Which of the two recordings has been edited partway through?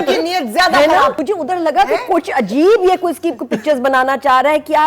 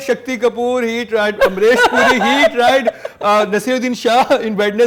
first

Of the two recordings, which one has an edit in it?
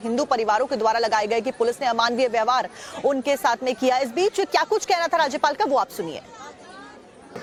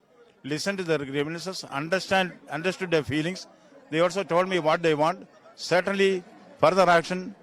second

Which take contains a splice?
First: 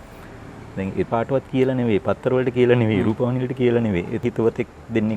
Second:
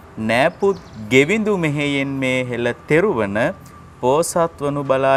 first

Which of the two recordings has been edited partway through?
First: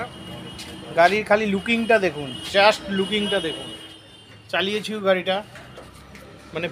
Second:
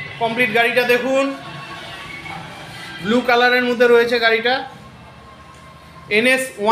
first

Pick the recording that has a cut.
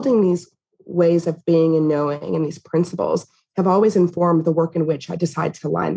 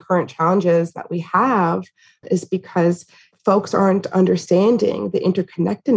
first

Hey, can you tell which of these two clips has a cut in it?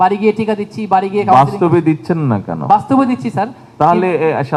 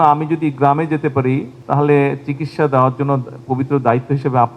second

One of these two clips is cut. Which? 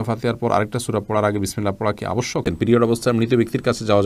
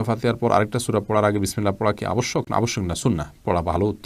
first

